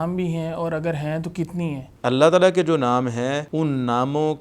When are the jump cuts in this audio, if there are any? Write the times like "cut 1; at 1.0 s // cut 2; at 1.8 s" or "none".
cut 1; at 1.8 s // cut 2; at 3.5 s